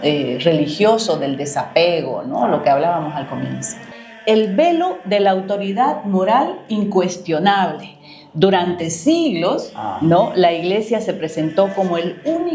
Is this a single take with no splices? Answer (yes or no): no